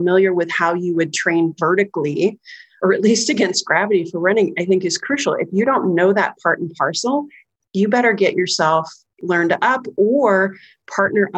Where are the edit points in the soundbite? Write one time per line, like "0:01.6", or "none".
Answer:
0:02.8
0:09.1